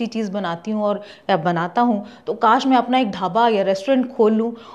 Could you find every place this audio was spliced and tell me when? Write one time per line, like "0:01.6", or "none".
none